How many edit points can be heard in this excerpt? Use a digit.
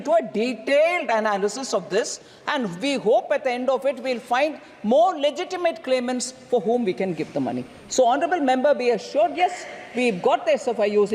0